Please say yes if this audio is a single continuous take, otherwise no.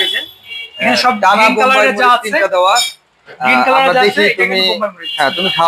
yes